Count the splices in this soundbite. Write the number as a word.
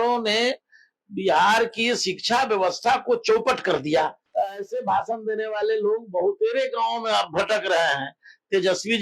one